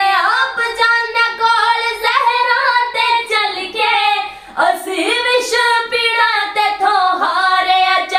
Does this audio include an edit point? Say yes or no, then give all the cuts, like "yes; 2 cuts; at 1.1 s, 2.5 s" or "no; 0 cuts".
no; 0 cuts